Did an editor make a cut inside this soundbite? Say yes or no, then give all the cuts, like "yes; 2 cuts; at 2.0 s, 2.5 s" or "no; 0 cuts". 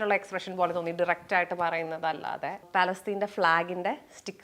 yes; 1 cut; at 2.6 s